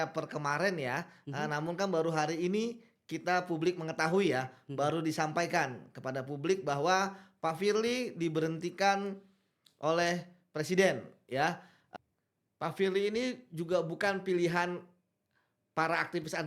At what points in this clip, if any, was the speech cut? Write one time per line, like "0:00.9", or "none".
0:11.7